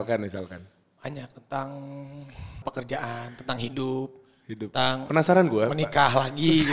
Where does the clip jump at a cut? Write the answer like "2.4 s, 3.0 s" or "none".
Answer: 2.6 s